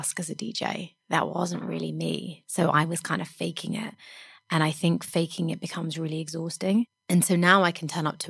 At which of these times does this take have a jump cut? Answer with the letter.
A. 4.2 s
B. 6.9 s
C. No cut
B